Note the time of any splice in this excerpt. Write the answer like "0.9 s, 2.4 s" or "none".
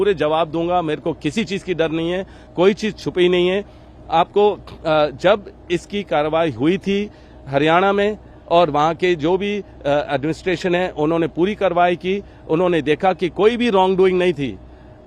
none